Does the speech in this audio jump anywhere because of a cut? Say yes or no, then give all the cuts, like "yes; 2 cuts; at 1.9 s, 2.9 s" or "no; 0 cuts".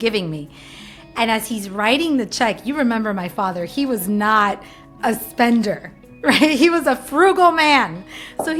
no; 0 cuts